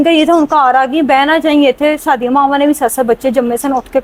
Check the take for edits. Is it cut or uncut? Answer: uncut